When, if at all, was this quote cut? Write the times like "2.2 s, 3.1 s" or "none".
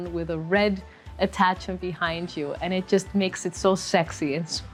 none

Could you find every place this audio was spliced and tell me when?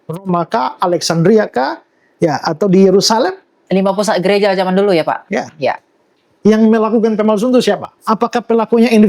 6.2 s, 7.9 s

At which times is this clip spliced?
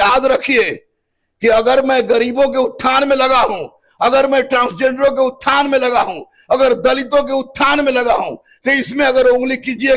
none

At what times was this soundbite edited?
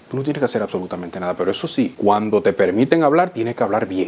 1.9 s

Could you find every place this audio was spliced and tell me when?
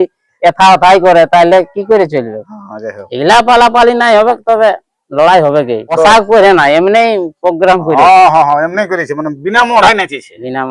5.9 s

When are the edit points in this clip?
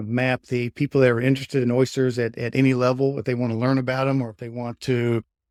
none

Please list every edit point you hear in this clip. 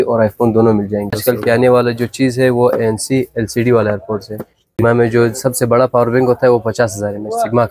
1.2 s, 4.8 s

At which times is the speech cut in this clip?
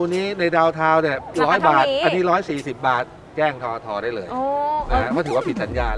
none

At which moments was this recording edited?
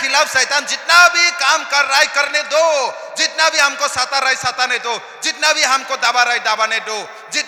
none

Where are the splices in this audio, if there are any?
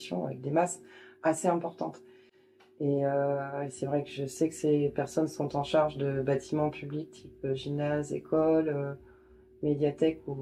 none

